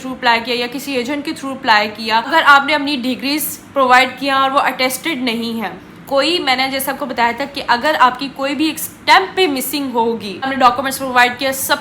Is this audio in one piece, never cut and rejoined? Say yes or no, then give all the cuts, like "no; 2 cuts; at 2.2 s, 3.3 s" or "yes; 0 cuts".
no; 2 cuts; at 2.3 s, 10.5 s